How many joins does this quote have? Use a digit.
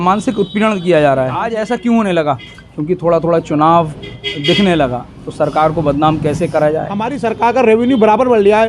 2